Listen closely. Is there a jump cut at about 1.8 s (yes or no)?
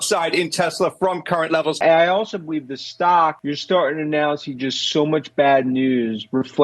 yes